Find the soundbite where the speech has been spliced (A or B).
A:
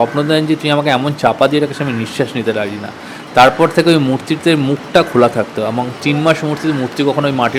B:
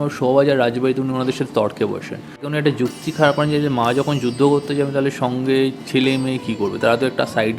B